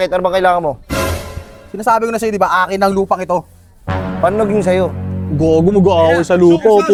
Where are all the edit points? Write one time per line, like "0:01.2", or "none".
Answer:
none